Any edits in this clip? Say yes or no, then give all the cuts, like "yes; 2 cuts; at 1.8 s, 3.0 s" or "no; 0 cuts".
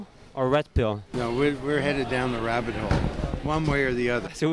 yes; 1 cut; at 1.0 s